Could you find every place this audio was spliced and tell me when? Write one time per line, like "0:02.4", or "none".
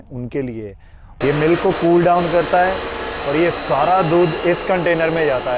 0:01.1